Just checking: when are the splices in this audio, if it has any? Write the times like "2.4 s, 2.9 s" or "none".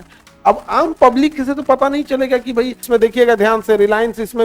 2.8 s